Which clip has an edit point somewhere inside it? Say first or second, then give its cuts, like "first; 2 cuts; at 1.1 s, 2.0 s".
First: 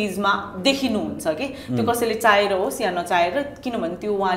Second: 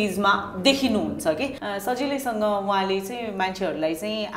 second; 1 cut; at 1.5 s